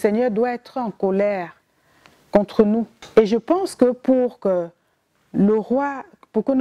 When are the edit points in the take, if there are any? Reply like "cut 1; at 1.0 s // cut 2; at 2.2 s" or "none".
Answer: cut 1; at 3.0 s